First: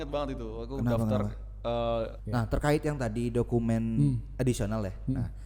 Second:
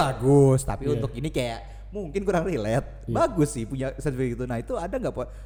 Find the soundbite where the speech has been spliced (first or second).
first